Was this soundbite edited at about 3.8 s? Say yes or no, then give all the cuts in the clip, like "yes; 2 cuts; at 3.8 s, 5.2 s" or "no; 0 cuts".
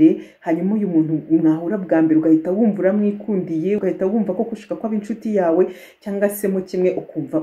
yes; 1 cut; at 3.8 s